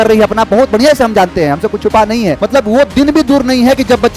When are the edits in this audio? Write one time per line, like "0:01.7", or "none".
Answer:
0:02.4